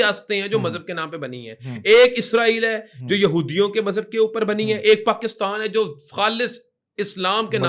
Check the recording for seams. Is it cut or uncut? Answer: uncut